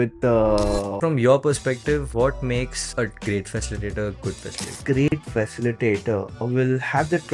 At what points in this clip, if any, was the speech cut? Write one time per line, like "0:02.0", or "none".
0:01.0
0:04.7